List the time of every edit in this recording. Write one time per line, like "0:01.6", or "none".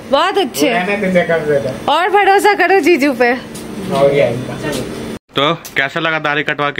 0:05.2